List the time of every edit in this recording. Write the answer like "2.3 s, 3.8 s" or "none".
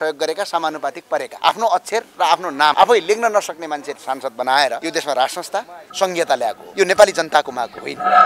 1.3 s, 2.7 s, 4.8 s, 5.8 s, 6.6 s

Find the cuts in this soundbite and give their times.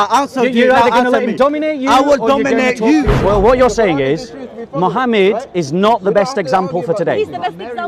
3.1 s

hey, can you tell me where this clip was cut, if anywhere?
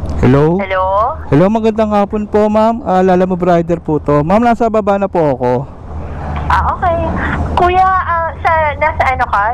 none

